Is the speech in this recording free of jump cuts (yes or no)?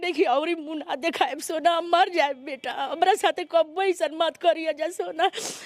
yes